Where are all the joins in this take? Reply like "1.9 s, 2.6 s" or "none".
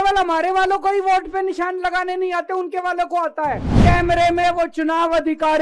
3.7 s